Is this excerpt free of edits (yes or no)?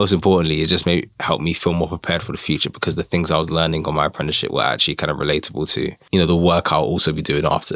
no